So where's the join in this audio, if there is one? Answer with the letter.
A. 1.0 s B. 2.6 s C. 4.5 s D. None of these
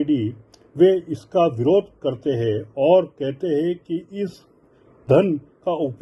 D